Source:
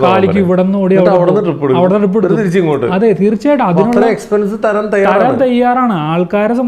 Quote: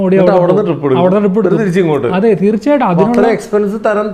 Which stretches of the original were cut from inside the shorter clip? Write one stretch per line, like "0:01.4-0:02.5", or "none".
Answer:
none